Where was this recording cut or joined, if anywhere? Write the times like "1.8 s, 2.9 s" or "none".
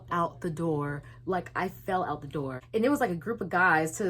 2.6 s